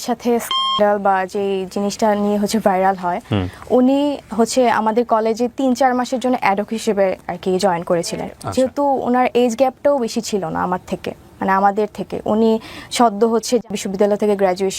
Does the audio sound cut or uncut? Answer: cut